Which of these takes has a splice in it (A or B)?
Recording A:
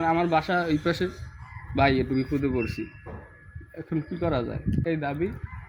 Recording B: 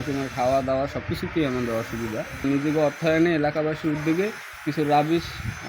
B